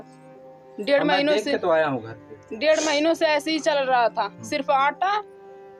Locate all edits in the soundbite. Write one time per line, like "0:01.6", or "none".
none